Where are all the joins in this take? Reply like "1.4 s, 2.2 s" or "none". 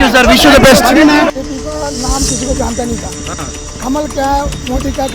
1.3 s

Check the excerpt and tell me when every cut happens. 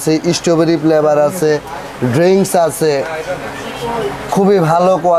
none

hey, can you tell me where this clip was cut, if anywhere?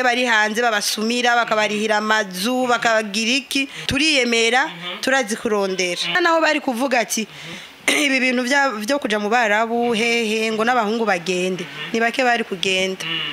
3.8 s, 6.2 s

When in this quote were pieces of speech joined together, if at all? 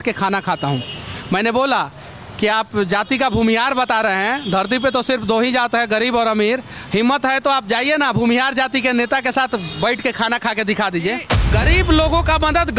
11.4 s

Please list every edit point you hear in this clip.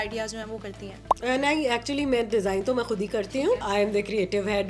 3.6 s

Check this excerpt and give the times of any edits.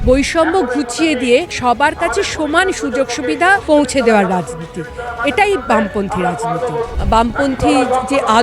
1.5 s, 3.6 s, 6.9 s

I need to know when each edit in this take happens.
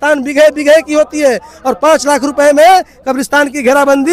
none

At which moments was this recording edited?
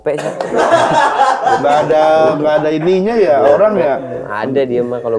none

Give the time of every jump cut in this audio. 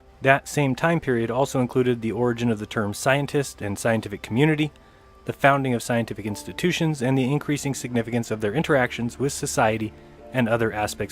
9.5 s

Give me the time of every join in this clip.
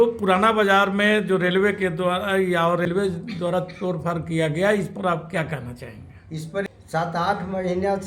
2.9 s, 6.6 s

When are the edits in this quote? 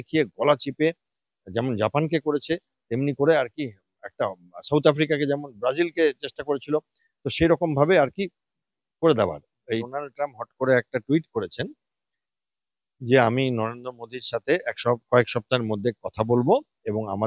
9.8 s

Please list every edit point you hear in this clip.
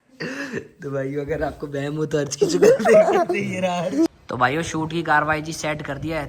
4.1 s

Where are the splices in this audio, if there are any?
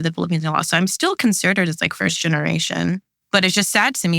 3.1 s

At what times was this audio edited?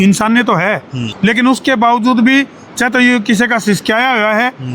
1.0 s

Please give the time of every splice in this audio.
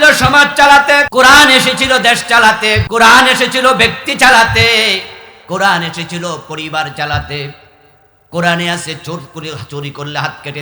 1.1 s, 2.8 s

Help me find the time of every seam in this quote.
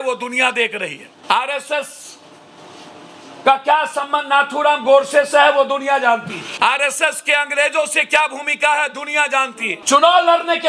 1.1 s, 6.4 s, 9.7 s

